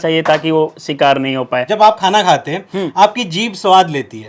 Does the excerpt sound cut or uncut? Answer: cut